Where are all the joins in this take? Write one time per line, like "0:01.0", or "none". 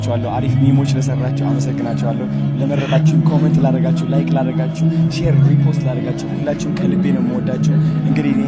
none